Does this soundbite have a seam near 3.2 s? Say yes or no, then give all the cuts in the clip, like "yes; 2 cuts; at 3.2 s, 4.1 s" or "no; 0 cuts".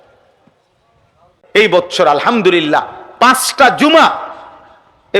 no; 1 cut; at 1.4 s